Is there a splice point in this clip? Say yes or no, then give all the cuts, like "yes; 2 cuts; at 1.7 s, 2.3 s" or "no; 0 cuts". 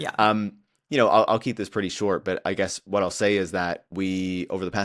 no; 0 cuts